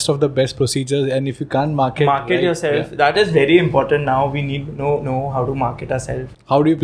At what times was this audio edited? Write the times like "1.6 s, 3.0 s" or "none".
none